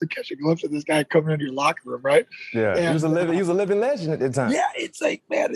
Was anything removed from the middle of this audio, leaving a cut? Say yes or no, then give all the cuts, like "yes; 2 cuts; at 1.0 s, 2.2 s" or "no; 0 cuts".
no; 0 cuts